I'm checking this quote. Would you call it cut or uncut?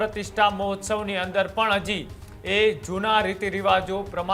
uncut